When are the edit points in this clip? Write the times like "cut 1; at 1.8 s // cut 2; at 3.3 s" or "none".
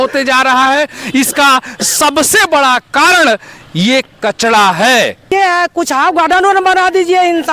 cut 1; at 5.3 s

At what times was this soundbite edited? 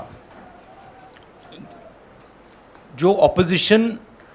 none

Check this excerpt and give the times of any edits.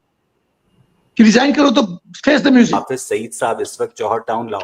cut 1; at 2.7 s

